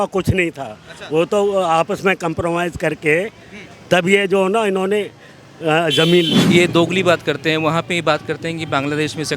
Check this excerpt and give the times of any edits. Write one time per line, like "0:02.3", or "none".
0:06.4